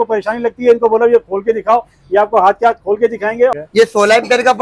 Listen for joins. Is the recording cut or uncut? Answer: cut